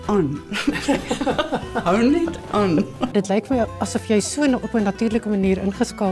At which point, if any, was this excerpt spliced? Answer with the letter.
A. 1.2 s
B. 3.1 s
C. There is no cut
B